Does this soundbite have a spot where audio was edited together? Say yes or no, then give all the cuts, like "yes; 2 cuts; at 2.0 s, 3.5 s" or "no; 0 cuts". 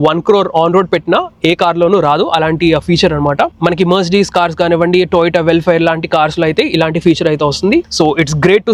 no; 0 cuts